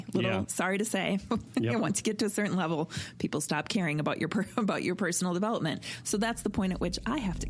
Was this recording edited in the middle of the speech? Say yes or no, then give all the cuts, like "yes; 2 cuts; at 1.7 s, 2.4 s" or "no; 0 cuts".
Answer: no; 0 cuts